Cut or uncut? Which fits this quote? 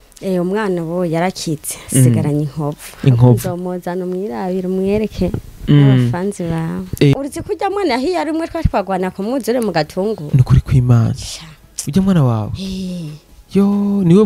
cut